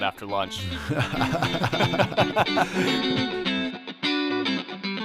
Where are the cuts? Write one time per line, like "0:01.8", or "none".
0:02.7